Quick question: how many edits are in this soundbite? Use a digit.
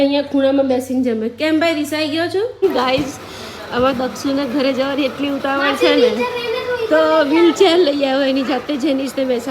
1